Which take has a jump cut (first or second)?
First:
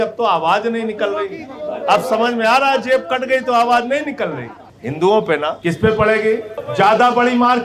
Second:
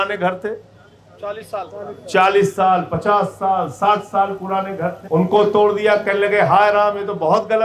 first